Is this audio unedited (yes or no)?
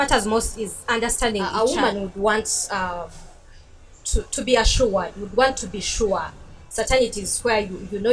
no